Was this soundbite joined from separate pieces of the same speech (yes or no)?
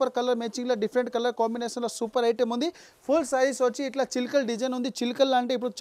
no